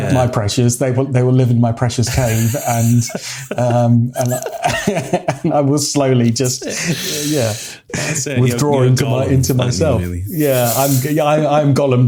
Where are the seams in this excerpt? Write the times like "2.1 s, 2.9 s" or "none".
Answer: none